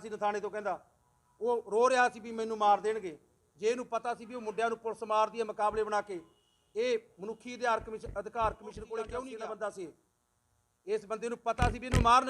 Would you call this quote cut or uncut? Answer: cut